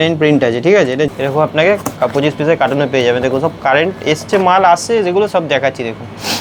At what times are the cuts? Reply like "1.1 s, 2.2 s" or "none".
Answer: 1.1 s